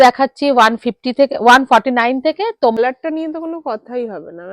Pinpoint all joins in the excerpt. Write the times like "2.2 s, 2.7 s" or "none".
2.8 s